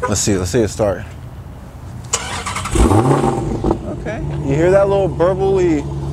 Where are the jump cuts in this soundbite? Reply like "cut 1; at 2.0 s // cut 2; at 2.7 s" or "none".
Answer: none